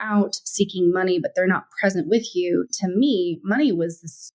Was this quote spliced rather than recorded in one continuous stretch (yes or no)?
no